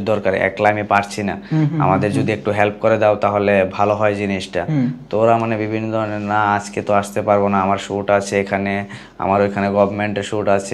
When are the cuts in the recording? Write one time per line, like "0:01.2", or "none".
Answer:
none